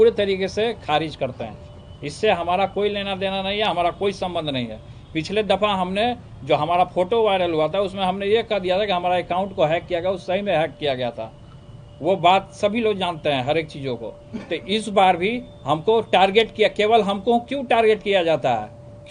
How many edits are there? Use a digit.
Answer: 0